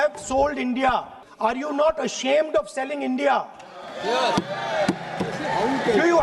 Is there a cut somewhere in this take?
yes; 1 cut; at 1.2 s

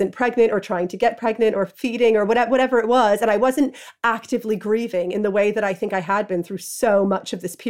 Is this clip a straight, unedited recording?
yes; 0 cuts

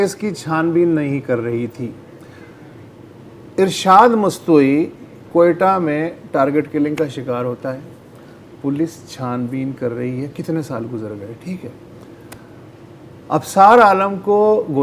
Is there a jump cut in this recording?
no; 0 cuts

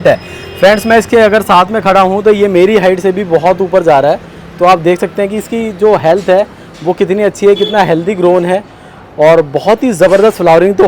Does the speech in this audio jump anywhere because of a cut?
no; 0 cuts

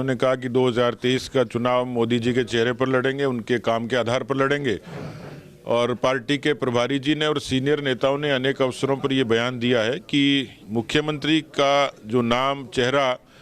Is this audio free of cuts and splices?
yes; 0 cuts

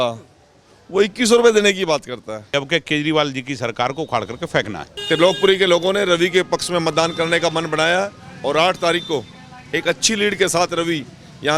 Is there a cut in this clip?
yes; 2 cuts; at 2.5 s, 4.9 s

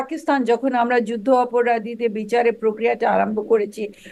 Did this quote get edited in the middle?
no; 0 cuts

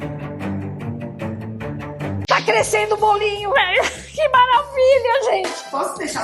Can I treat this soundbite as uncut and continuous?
no; 1 cut; at 2.1 s

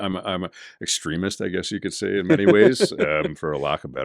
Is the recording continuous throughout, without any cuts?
yes; 0 cuts

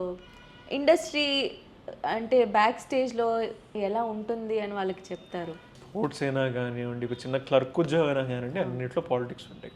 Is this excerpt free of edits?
no; 2 cuts; at 3.7 s, 5.8 s

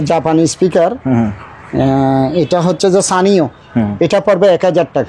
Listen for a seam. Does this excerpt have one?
no; 0 cuts

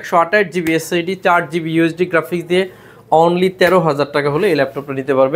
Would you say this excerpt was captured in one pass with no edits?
yes; 0 cuts

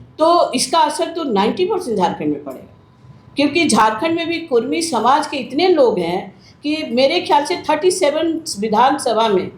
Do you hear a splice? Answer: no; 0 cuts

